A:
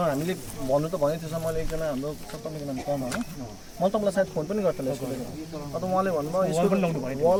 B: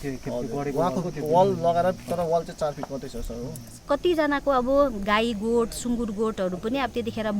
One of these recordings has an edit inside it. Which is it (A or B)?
B